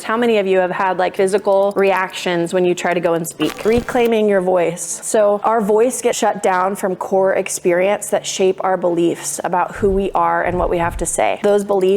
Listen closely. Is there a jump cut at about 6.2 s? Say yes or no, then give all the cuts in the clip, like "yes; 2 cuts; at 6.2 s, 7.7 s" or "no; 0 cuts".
yes; 2 cuts; at 3.6 s, 6.2 s